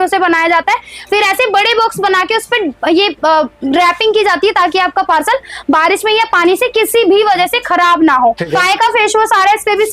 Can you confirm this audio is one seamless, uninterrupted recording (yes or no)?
no